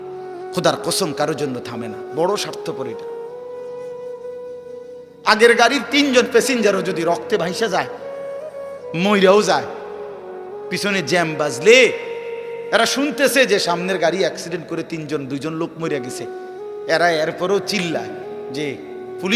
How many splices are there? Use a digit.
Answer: 2